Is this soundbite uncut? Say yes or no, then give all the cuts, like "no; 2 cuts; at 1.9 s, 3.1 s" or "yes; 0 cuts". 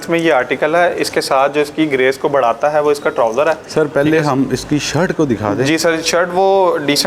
yes; 0 cuts